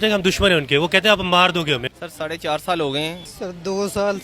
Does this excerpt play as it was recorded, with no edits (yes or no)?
no